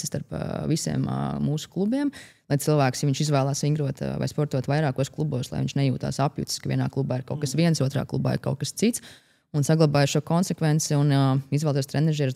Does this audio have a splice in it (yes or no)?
no